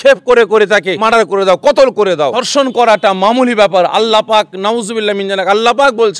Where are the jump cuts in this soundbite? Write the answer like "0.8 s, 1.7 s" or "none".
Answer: 0.9 s, 2.4 s